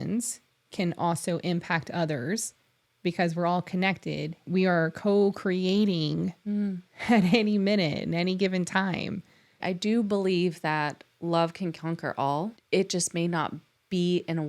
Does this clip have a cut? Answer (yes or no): yes